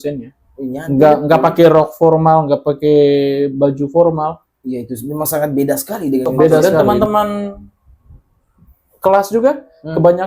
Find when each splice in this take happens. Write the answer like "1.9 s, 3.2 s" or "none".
6.6 s